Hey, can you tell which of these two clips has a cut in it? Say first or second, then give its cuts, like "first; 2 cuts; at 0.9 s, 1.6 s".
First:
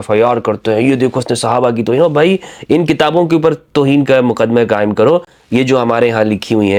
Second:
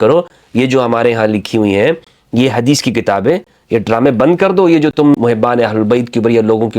second; 1 cut; at 5.1 s